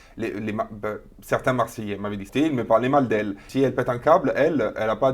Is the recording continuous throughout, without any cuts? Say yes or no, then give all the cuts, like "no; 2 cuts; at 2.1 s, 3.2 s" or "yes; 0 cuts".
no; 2 cuts; at 2.3 s, 3.4 s